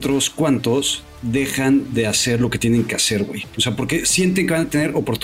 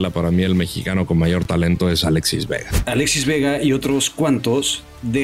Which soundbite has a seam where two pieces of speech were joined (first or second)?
second